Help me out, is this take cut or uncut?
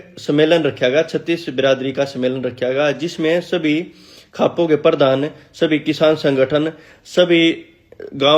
uncut